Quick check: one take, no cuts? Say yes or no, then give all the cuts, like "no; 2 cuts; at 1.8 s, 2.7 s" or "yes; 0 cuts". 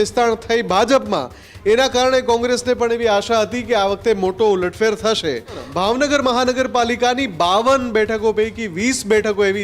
no; 1 cut; at 5.7 s